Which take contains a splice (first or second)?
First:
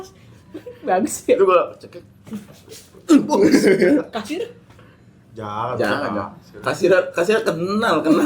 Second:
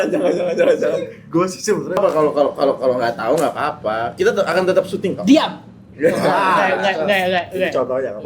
second